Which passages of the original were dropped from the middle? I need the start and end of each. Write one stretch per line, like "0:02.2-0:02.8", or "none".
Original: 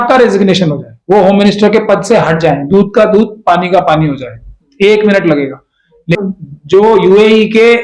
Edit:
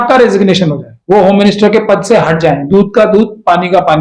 none